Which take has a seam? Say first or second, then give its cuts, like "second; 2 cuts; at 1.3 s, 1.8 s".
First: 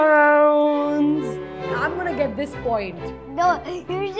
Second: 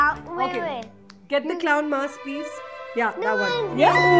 first; 1 cut; at 1.7 s